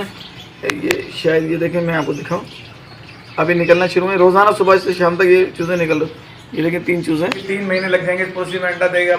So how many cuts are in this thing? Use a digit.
1